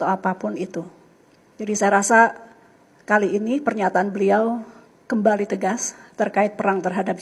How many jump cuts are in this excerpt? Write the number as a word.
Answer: zero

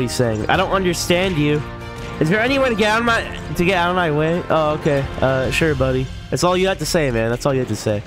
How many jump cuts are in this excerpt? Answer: zero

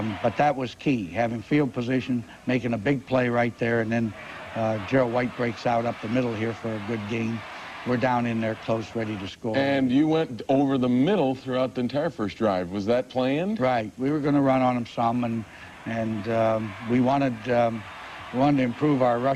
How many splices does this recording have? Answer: one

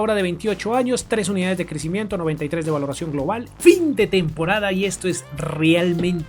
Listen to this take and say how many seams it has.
one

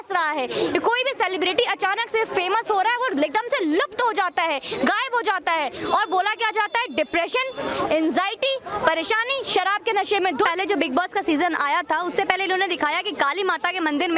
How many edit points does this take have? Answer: one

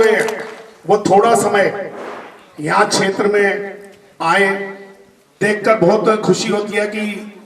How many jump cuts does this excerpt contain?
one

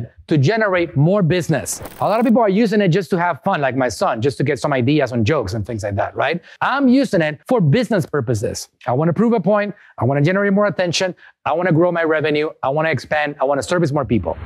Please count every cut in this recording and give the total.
zero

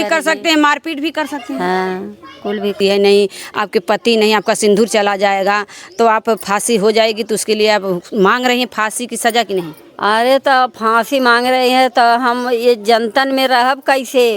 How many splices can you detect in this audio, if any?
one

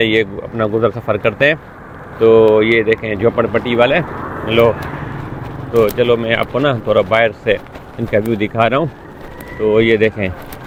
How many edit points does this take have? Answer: zero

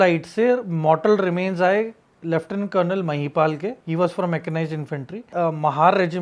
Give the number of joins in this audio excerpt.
two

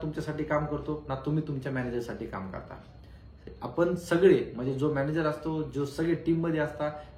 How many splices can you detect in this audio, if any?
zero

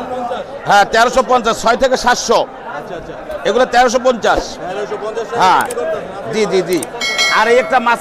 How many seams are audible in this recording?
zero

